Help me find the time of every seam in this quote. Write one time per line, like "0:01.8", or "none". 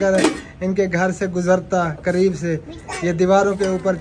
none

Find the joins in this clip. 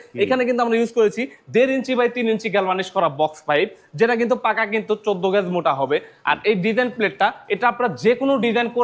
none

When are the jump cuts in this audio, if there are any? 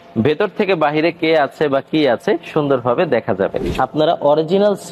0:03.7

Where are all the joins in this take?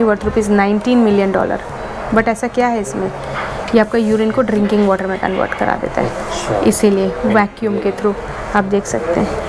none

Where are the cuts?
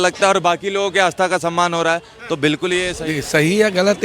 0:03.0

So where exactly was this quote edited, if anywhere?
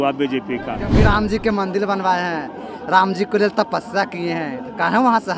0:00.9

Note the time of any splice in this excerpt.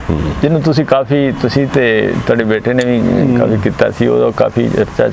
none

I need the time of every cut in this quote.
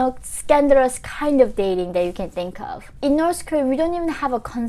0:02.9

